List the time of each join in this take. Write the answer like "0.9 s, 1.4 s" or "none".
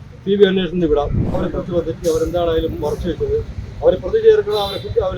1.4 s